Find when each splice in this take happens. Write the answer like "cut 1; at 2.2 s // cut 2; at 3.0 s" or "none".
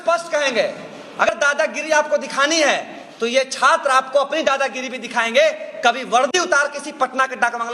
cut 1; at 1.3 s

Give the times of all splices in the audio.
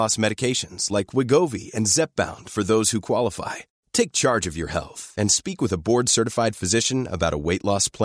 none

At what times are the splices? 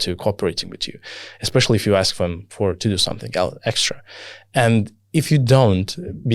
none

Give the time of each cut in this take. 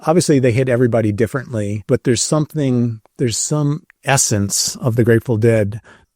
cut 1; at 1.8 s // cut 2; at 3.0 s

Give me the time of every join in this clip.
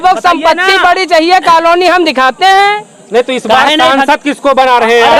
none

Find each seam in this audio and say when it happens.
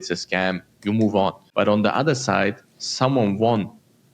cut 1; at 1.4 s

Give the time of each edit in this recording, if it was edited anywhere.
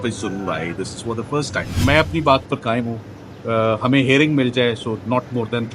cut 1; at 1.7 s

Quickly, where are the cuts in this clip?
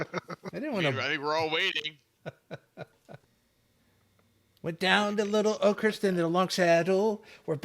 cut 1; at 3.4 s

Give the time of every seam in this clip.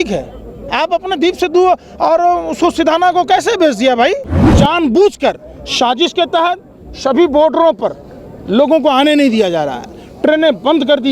cut 1; at 4.5 s

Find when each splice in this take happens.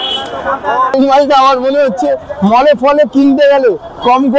cut 1; at 1.0 s

